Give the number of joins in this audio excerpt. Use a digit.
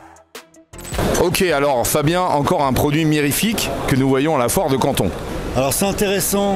2